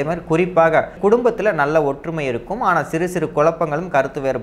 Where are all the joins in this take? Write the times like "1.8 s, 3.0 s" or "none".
0.9 s